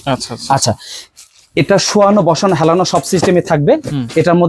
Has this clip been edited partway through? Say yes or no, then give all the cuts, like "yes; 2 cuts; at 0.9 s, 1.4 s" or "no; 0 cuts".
no; 0 cuts